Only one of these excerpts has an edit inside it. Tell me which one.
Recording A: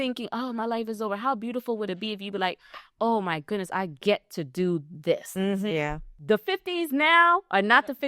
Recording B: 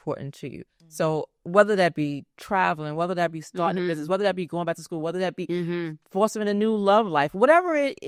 A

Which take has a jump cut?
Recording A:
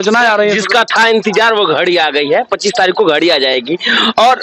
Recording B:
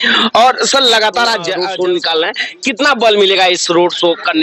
B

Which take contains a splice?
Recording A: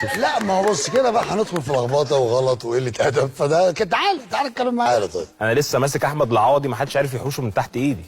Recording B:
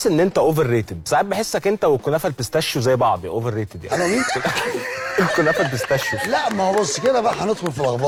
A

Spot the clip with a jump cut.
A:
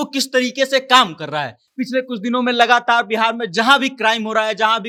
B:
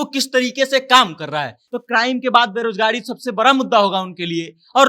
B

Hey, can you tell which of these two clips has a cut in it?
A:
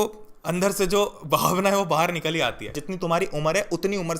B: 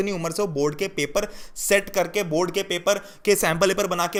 A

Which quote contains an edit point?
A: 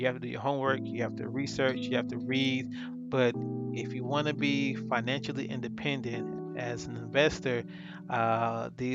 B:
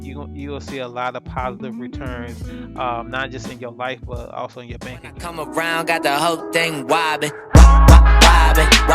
B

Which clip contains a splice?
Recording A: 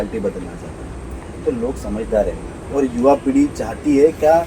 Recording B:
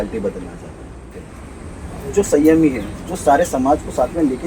B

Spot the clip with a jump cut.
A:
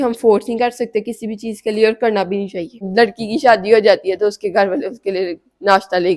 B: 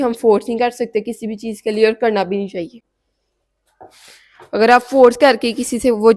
A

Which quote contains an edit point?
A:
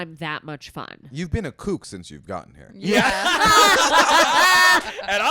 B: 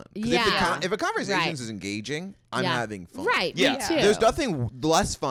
A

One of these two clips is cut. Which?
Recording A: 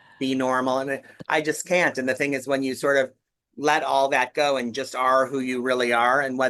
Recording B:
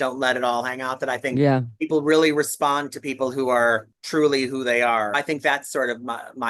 B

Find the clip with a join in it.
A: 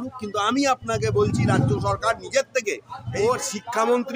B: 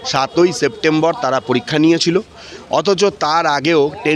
A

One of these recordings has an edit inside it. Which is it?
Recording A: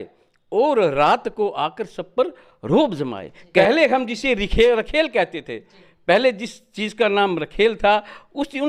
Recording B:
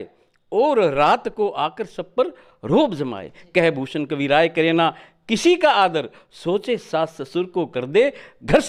A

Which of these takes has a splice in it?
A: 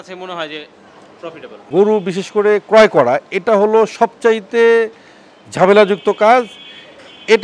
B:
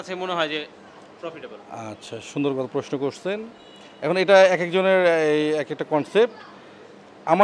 A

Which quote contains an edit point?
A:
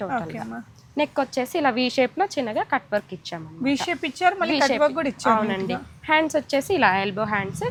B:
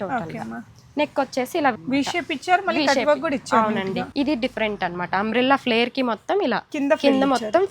B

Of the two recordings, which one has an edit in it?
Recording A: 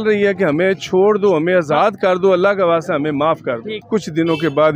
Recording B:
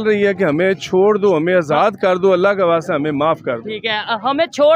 A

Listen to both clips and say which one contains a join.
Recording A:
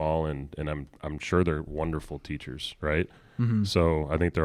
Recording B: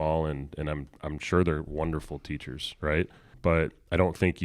B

